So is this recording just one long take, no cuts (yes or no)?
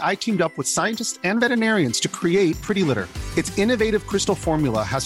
yes